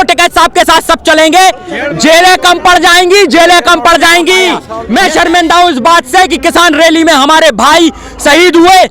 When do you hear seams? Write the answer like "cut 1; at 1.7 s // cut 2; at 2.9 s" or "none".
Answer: cut 1; at 4.7 s